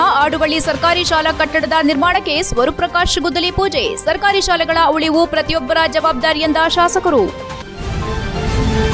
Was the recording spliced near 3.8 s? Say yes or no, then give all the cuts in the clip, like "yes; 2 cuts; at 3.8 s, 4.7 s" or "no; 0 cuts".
no; 1 cut; at 7.5 s